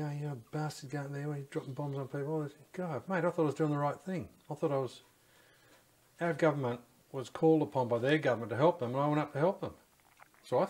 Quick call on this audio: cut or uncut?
uncut